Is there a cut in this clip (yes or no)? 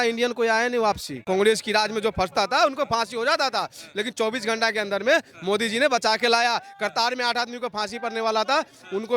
yes